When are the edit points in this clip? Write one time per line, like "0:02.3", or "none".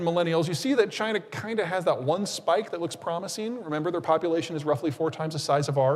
none